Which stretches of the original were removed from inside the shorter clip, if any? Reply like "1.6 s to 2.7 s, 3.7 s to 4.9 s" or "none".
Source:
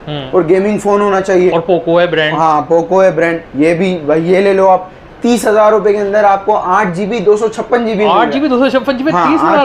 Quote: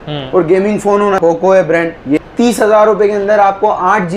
1.2 s to 2.7 s, 3.7 s to 5.1 s